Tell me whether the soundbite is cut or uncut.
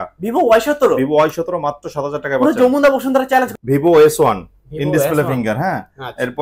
cut